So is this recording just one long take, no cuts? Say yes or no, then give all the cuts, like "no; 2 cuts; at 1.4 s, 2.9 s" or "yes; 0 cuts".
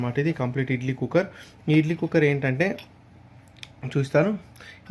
yes; 0 cuts